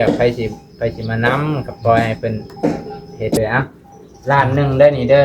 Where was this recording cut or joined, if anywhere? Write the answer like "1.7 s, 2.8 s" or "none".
3.4 s

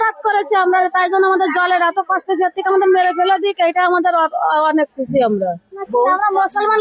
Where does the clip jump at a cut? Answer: 5.9 s

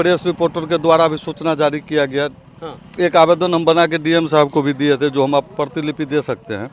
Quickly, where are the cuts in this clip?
none

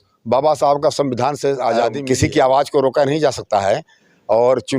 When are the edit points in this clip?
2.0 s

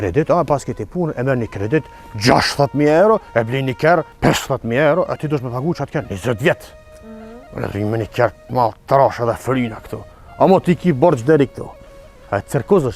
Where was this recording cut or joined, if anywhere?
4.1 s

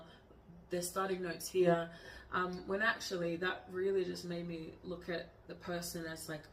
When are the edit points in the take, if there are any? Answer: none

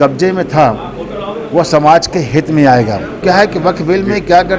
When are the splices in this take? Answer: 3.2 s

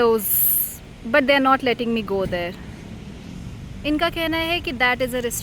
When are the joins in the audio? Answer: none

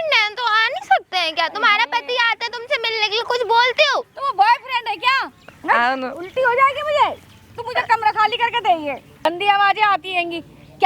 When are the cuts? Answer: 5.4 s, 9.2 s

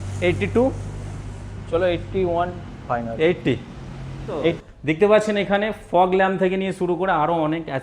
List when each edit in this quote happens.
4.6 s

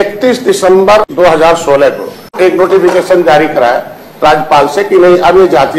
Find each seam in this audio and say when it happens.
1.1 s, 2.3 s

